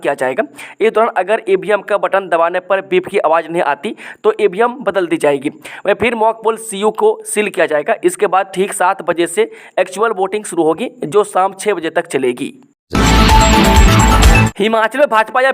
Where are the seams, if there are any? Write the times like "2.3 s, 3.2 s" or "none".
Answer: 12.8 s, 14.6 s